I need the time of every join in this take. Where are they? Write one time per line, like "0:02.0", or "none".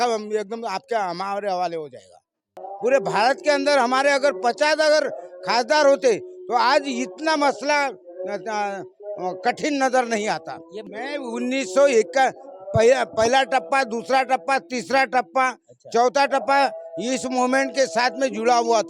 0:02.7
0:10.9

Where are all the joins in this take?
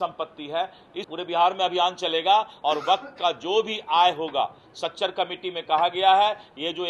0:01.1

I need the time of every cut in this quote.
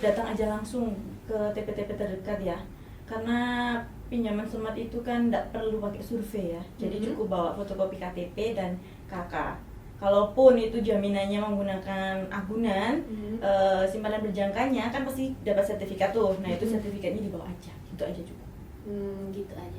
none

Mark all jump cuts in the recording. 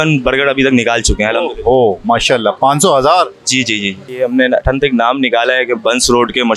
0:04.2

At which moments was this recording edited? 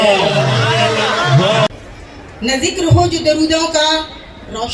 0:01.7

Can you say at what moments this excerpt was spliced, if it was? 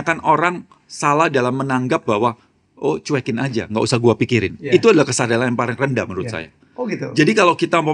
none

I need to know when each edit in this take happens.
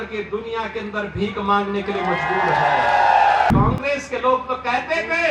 0:03.5

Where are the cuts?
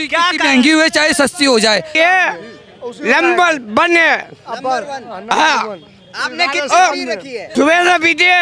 0:01.9
0:07.4

